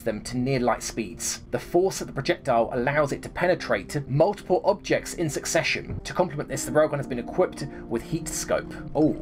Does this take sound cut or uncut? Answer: uncut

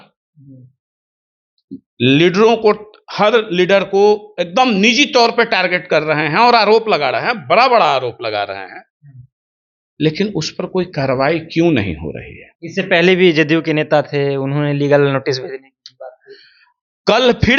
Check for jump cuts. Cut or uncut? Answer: uncut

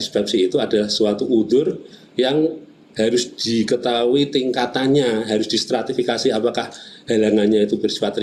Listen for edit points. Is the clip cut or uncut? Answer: uncut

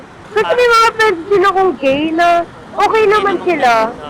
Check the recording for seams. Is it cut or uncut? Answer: uncut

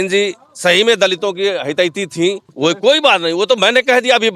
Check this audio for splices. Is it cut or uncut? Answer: cut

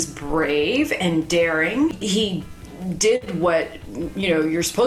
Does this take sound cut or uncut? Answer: cut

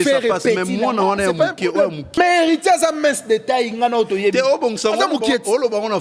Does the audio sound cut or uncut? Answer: cut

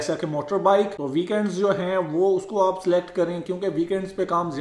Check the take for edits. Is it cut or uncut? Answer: cut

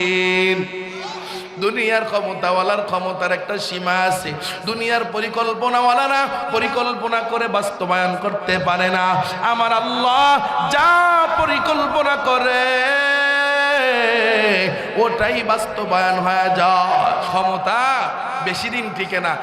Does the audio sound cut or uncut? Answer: cut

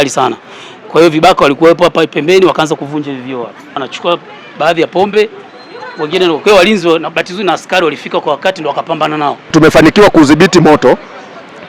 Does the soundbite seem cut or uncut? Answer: cut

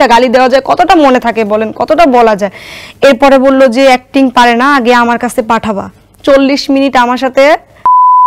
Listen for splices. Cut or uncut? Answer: uncut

